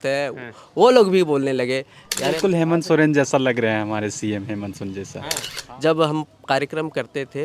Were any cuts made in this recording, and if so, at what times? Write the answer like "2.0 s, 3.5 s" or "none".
2.3 s, 5.5 s